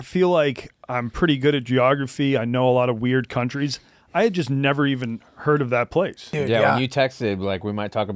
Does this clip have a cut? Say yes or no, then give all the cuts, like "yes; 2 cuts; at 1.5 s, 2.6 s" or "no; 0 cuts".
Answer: yes; 1 cut; at 6.2 s